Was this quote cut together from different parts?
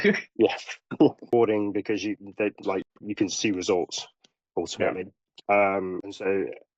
yes; 1 cut; at 1.2 s

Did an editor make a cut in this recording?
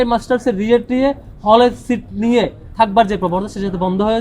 no; 0 cuts

